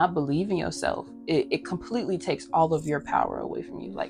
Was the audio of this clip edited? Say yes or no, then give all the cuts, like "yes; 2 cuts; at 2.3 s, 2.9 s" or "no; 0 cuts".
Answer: no; 0 cuts